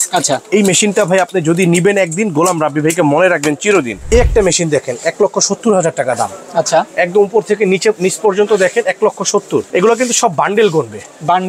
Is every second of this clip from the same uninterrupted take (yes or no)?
no